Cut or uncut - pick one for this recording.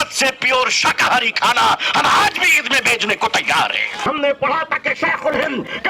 cut